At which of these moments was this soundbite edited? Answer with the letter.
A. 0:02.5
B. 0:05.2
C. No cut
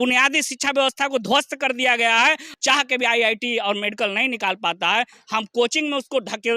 A